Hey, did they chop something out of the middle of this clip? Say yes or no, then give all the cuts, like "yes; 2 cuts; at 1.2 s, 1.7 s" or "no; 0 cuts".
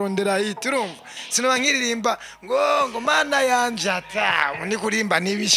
no; 0 cuts